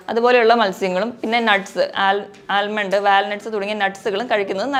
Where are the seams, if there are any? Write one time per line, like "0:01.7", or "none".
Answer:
none